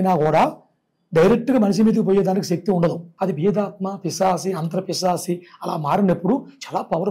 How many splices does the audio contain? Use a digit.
1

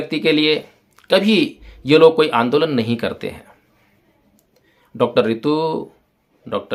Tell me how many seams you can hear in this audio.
0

